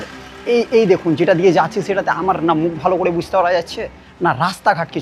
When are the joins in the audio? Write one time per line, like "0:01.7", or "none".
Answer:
none